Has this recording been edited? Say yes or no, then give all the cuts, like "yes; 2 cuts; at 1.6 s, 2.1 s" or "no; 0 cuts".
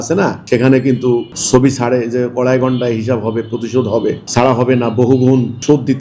no; 0 cuts